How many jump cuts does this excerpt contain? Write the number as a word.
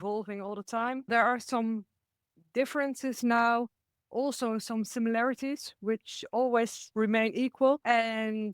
two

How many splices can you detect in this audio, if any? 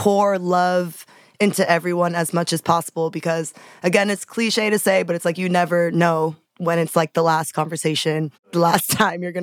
two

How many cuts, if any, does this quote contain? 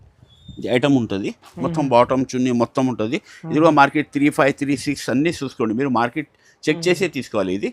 zero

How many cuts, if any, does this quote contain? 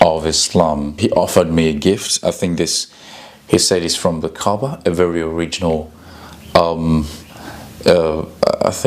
one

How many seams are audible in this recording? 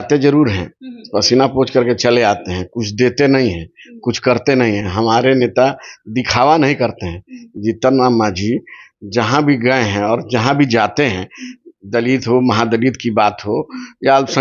zero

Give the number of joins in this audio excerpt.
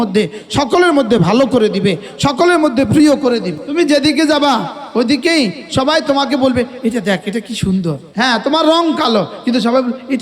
two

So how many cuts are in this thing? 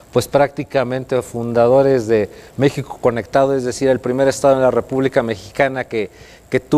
one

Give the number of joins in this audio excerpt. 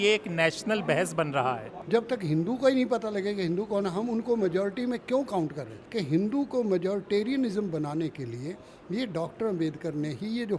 two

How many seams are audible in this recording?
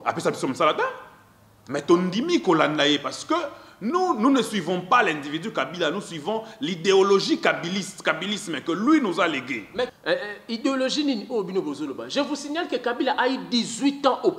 one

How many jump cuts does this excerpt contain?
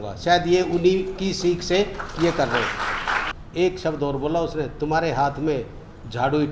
one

